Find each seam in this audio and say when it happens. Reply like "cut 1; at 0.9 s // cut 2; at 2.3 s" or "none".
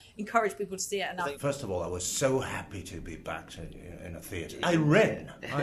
cut 1; at 1.3 s // cut 2; at 4.6 s